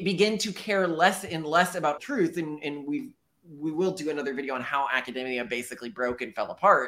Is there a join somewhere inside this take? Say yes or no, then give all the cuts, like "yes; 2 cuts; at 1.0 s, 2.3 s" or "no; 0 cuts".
no; 0 cuts